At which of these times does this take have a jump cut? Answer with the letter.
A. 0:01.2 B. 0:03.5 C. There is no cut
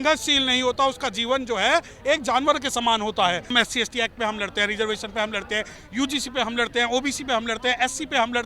B